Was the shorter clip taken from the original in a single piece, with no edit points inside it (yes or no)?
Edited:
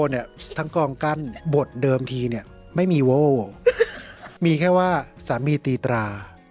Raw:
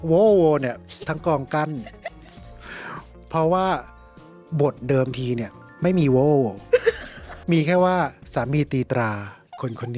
no